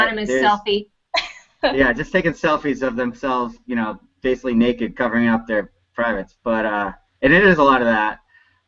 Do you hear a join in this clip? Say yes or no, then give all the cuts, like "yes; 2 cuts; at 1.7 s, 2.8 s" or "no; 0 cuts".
yes; 1 cut; at 6.3 s